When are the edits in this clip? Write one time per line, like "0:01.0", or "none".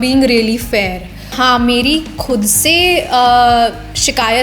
0:01.3